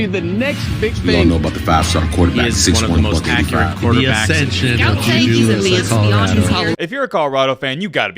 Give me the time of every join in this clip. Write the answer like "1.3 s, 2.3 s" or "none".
6.7 s